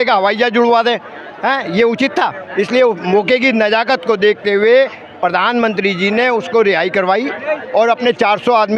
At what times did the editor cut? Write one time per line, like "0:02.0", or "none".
none